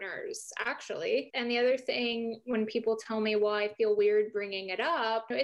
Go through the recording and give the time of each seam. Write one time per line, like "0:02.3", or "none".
none